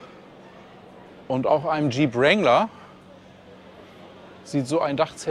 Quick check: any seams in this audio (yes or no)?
no